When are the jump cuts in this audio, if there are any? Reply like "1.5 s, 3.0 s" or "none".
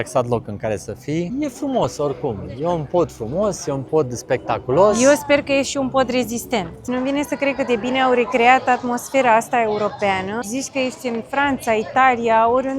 1.3 s, 6.8 s, 10.4 s